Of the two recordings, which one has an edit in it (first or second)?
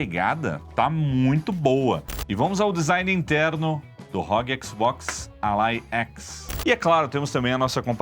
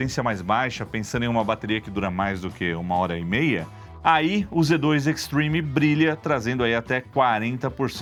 first